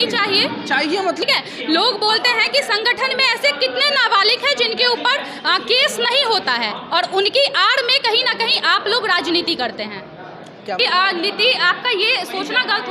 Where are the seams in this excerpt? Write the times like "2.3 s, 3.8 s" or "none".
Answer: 1.2 s, 10.8 s